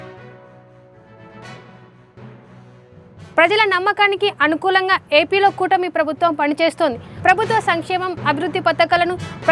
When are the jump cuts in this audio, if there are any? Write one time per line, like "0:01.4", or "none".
0:02.3